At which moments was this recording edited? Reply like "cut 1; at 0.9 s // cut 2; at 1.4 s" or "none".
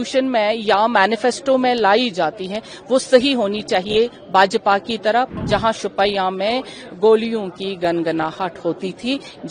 cut 1; at 5.3 s